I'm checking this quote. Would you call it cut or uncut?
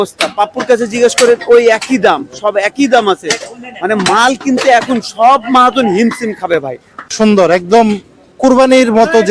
cut